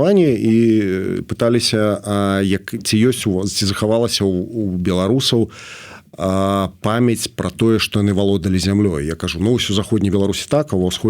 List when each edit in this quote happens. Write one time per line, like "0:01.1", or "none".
none

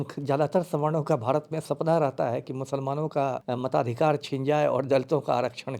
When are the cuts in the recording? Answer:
0:03.4

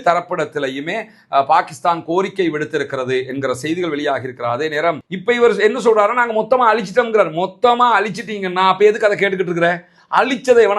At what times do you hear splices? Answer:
0:05.1

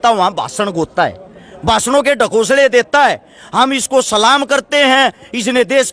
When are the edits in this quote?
none

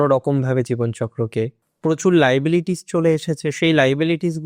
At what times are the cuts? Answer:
0:01.5

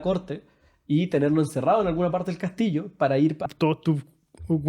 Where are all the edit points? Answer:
0:03.5

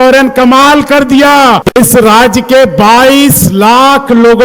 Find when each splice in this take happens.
0:01.6

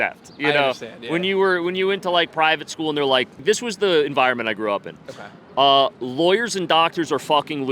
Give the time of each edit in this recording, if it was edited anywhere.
0:03.4

